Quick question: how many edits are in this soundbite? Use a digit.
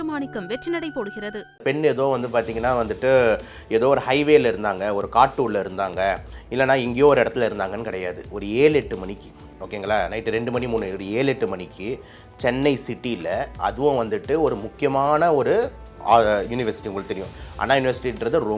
1